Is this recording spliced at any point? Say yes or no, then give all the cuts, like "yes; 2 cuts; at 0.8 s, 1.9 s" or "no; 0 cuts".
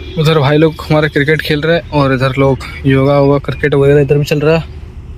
no; 0 cuts